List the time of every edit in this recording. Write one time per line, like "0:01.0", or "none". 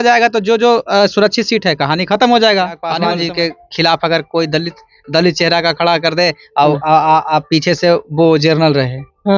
0:03.0